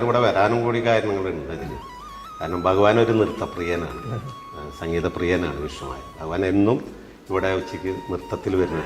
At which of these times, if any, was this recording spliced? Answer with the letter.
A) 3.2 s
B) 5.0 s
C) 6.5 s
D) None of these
D